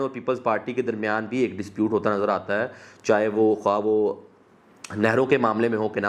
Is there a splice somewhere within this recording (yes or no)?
no